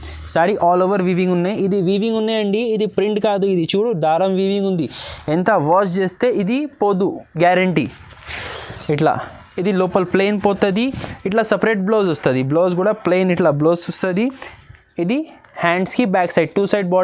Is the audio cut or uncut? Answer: uncut